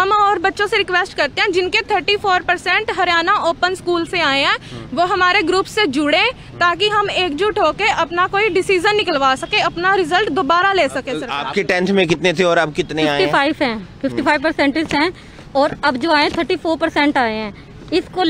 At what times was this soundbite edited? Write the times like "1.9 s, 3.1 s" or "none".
11.4 s